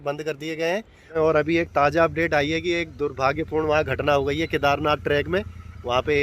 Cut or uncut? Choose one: cut